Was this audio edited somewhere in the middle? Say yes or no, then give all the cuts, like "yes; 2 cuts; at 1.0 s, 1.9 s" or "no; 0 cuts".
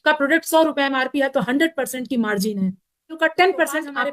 yes; 1 cut; at 3.1 s